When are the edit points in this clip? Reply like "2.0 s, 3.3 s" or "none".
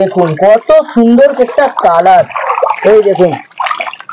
none